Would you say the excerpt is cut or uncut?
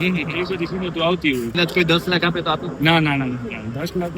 cut